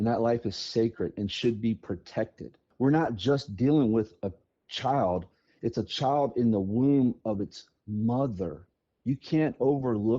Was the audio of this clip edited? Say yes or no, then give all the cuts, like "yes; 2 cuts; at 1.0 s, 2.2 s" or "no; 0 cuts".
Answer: yes; 1 cut; at 2.7 s